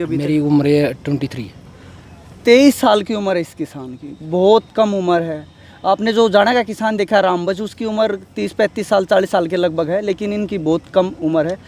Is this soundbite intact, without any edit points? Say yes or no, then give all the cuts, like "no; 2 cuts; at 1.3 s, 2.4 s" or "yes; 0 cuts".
yes; 0 cuts